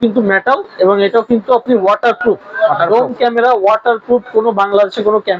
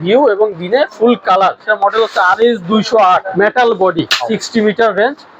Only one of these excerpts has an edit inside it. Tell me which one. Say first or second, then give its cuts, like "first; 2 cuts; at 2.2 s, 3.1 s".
second; 3 cuts; at 1.7 s, 3.3 s, 4.2 s